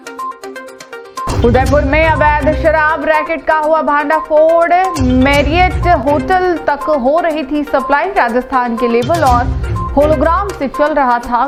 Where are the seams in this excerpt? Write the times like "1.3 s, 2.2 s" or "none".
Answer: none